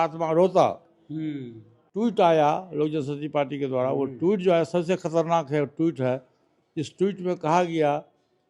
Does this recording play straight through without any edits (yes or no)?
no